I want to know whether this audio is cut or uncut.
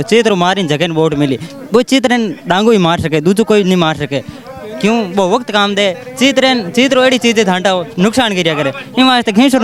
uncut